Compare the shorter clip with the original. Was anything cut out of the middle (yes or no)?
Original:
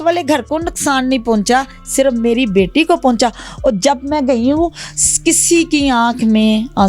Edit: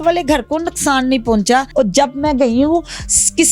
yes